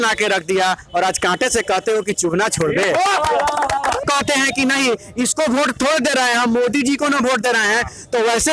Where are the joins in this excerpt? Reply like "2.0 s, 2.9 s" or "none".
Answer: 4.0 s